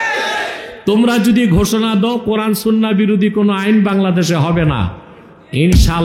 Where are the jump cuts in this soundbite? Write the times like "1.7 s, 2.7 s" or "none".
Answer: none

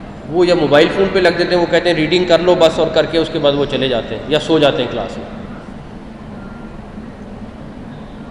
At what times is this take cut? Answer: none

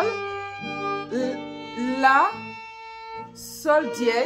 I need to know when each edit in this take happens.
none

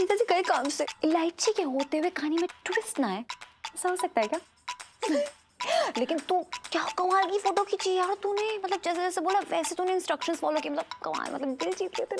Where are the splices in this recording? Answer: 0.9 s

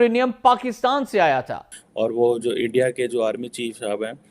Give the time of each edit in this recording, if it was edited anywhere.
2.0 s

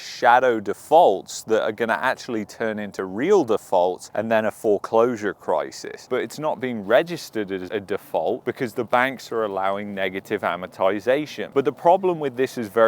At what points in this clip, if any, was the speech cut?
5.9 s, 7.7 s

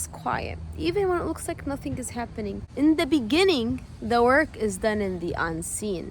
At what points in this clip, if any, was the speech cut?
2.6 s

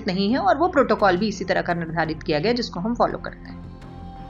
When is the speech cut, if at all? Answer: 3.4 s

